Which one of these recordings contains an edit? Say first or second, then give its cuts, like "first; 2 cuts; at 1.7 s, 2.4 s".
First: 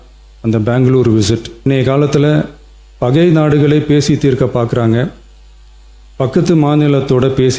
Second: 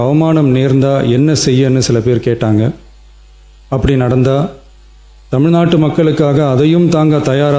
first; 1 cut; at 1.7 s